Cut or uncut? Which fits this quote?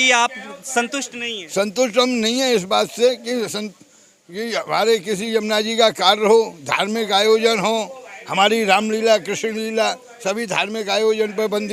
uncut